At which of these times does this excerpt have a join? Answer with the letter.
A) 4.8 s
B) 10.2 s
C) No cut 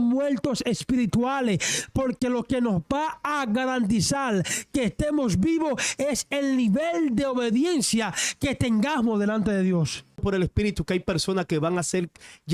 B